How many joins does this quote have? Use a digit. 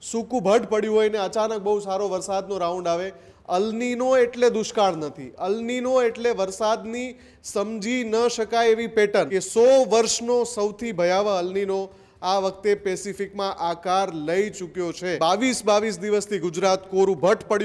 2